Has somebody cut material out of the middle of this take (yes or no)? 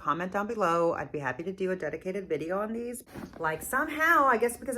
yes